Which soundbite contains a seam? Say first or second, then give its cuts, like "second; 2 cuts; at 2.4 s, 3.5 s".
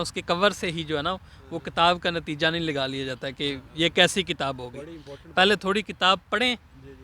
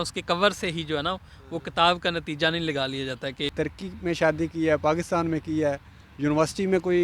second; 1 cut; at 3.5 s